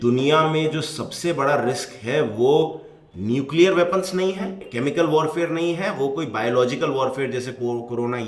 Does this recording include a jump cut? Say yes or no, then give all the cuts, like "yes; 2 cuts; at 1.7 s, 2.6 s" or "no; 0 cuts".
yes; 1 cut; at 4.6 s